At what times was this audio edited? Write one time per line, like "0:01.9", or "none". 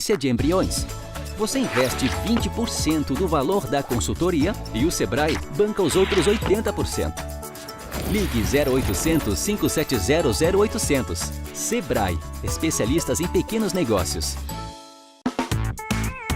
0:15.0